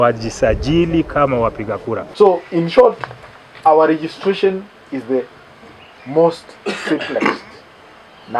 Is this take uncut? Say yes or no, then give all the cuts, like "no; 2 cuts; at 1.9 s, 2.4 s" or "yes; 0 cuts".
no; 1 cut; at 2.0 s